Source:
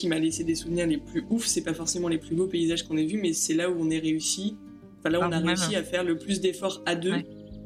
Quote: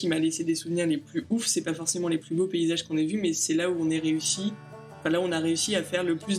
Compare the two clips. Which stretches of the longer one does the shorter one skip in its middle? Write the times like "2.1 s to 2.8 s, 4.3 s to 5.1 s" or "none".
none